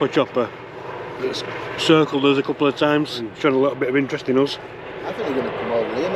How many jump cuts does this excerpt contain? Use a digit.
2